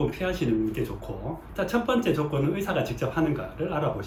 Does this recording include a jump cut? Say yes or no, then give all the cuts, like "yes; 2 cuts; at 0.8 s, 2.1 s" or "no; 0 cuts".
no; 0 cuts